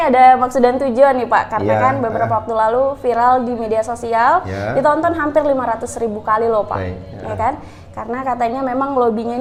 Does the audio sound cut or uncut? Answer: uncut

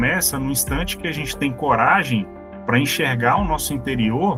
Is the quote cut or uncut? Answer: uncut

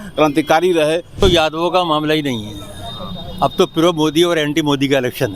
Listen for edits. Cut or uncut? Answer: cut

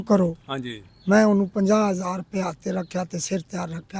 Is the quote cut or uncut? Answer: uncut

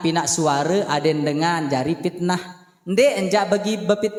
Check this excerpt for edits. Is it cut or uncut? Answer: uncut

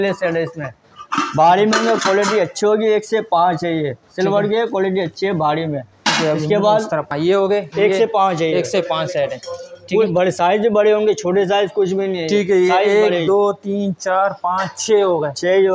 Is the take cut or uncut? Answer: uncut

